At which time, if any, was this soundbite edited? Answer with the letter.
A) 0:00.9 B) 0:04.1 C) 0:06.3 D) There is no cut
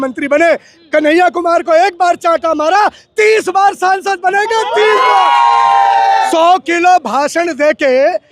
C